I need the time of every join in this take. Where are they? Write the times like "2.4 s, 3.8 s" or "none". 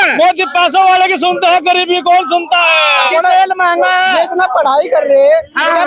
3.1 s